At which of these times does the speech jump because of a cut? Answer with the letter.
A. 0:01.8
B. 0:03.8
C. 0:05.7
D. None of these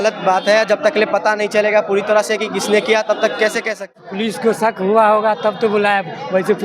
B